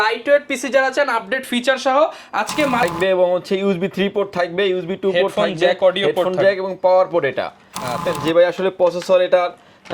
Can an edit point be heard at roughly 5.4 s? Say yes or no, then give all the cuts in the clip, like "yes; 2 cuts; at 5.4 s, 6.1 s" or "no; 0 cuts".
no; 2 cuts; at 2.9 s, 8.1 s